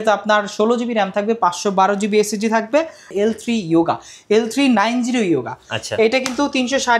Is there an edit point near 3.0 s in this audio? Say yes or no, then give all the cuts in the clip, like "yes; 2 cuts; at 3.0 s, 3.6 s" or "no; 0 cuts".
yes; 1 cut; at 3.0 s